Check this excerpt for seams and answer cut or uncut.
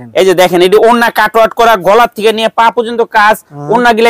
uncut